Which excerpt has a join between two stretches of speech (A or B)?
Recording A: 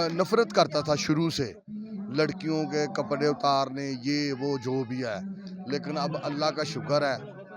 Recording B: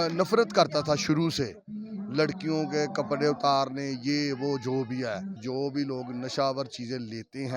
B